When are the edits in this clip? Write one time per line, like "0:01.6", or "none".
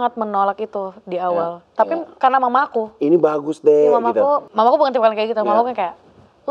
0:04.5